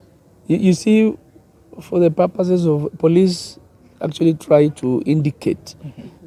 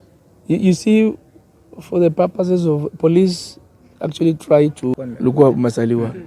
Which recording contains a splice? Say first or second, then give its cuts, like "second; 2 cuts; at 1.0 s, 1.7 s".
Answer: second; 1 cut; at 4.9 s